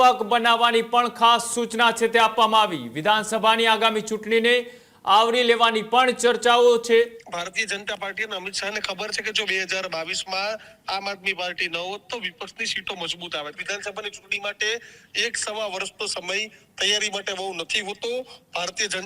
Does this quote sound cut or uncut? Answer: cut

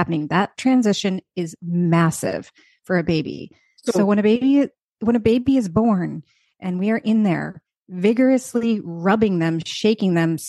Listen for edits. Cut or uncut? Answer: uncut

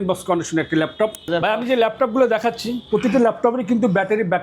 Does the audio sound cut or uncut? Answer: cut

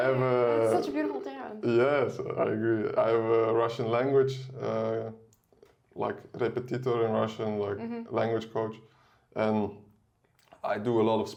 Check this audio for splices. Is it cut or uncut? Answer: uncut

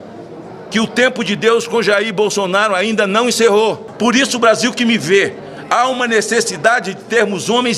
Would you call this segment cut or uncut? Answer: cut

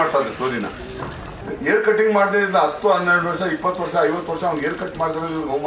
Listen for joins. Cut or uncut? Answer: cut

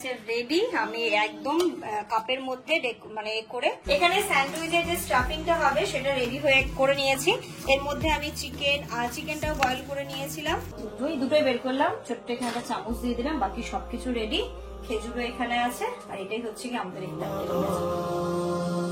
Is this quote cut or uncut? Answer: cut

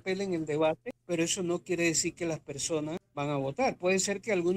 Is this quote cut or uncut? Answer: cut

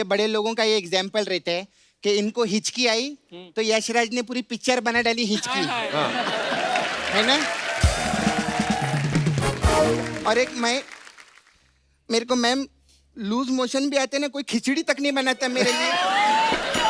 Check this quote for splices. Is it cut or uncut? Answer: uncut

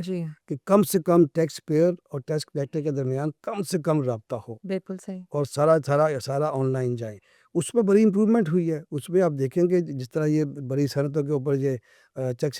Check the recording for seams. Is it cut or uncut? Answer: uncut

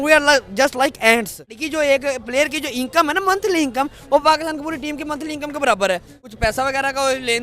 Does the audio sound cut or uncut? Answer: cut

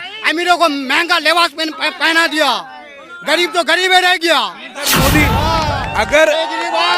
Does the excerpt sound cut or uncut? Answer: cut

